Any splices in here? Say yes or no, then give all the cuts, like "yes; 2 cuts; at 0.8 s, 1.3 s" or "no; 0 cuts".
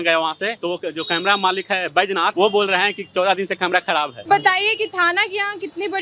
yes; 2 cuts; at 2.3 s, 4.2 s